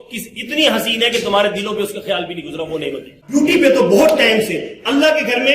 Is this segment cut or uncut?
cut